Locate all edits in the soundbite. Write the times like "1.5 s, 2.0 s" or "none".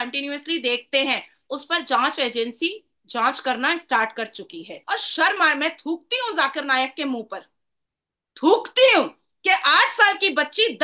4.7 s